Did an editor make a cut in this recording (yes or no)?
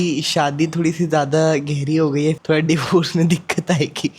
yes